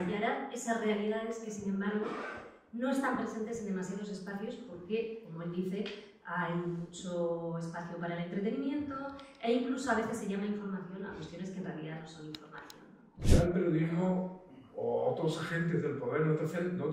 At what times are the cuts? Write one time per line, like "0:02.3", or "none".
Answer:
0:13.3